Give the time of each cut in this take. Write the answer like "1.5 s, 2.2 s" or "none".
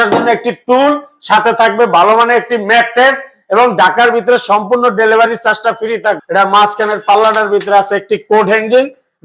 6.2 s